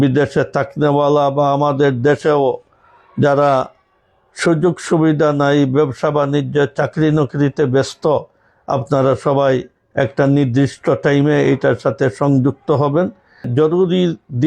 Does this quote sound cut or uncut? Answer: cut